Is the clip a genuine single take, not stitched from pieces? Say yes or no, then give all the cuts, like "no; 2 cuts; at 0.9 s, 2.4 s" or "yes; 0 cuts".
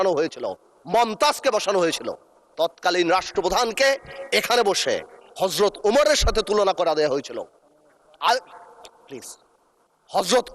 yes; 0 cuts